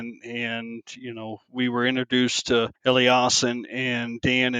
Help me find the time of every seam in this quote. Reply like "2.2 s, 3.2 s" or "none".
2.7 s